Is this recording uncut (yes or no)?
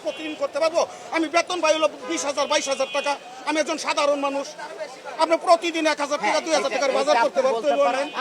yes